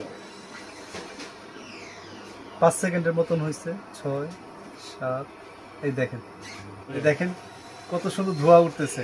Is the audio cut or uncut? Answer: cut